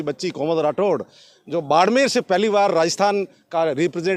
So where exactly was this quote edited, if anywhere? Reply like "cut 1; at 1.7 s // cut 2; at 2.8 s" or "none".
none